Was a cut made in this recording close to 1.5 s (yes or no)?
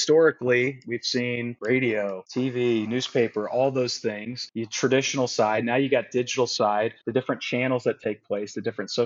yes